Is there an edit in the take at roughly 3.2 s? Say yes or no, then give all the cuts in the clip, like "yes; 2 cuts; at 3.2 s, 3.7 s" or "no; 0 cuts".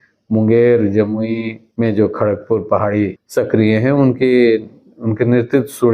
yes; 2 cuts; at 1.6 s, 3.2 s